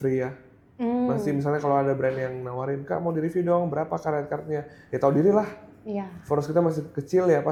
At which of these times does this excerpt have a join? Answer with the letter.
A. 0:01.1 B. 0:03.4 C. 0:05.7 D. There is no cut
D